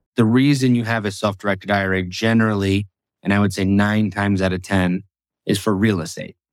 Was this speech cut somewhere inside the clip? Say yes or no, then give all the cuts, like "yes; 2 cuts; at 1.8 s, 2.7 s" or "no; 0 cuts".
no; 0 cuts